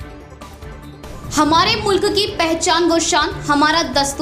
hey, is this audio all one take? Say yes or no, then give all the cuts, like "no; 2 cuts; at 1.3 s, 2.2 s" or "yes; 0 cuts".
no; 1 cut; at 1.0 s